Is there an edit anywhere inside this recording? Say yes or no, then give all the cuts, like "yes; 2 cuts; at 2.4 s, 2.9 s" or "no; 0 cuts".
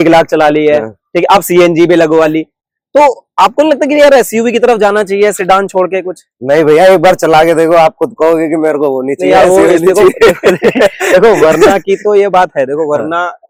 no; 0 cuts